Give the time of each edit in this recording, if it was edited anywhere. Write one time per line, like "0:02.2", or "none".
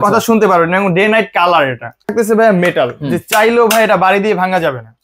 0:01.9